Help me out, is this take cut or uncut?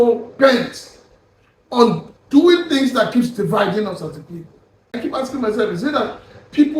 cut